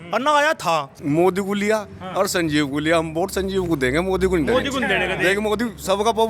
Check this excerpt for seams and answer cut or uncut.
cut